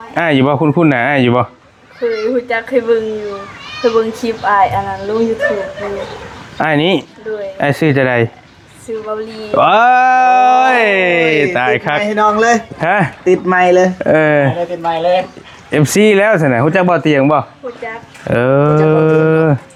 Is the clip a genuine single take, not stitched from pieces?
yes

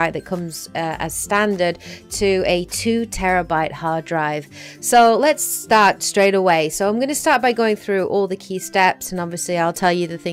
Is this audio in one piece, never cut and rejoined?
yes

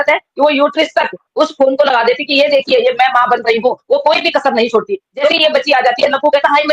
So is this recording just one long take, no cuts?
no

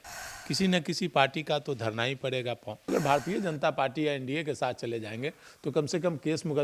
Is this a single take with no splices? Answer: no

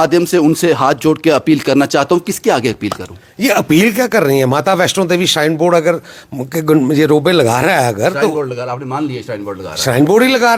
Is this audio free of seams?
yes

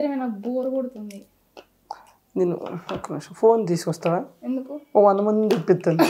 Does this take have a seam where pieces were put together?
no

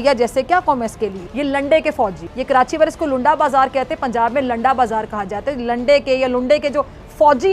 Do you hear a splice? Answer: no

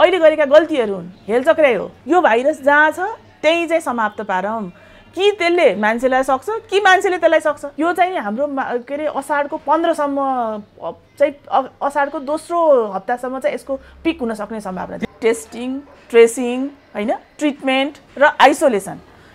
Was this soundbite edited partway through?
yes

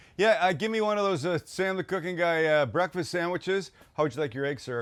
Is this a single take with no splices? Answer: yes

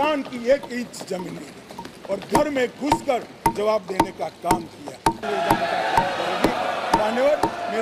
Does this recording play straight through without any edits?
no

